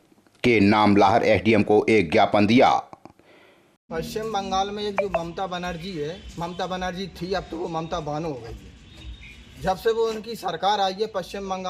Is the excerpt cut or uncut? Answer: cut